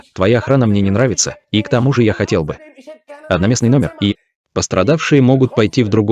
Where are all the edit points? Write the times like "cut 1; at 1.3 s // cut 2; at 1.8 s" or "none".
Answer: cut 1; at 4.1 s